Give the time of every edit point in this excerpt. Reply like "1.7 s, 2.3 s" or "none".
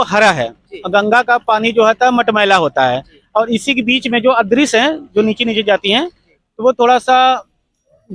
none

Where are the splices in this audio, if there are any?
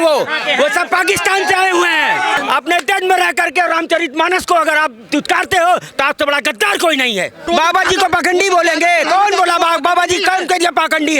2.4 s, 7.5 s

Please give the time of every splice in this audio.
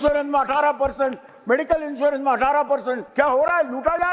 3.0 s

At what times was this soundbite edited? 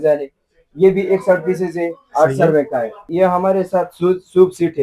3.0 s

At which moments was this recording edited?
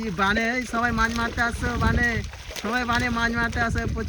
none

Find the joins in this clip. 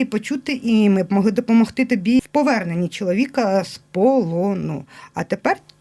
2.2 s

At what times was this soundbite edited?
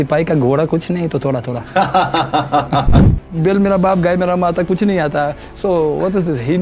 2.9 s

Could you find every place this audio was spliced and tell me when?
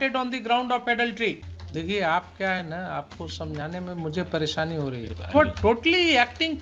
1.5 s, 5.1 s

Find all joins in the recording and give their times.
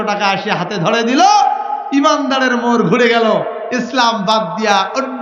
none

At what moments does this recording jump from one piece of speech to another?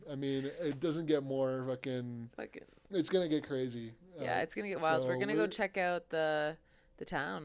none

